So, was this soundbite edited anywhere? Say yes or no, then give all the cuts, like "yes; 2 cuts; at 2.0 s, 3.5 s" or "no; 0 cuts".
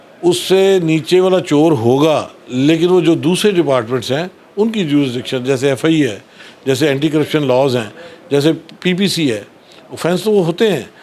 no; 0 cuts